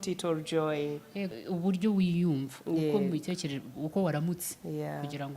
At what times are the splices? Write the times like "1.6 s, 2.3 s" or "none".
1.3 s